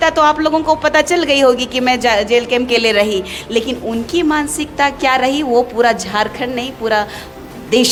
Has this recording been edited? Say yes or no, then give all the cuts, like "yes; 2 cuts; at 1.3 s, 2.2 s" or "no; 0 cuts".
no; 0 cuts